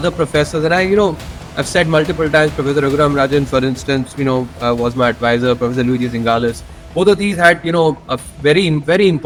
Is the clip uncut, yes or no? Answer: yes